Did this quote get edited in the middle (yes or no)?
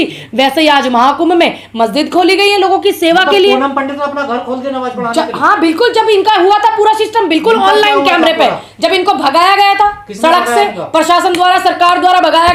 no